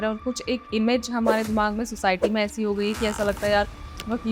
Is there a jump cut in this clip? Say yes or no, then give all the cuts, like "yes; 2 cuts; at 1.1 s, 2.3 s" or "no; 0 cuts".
no; 0 cuts